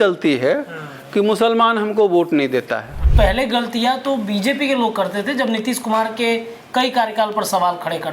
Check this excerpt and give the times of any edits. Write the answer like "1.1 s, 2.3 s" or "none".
3.0 s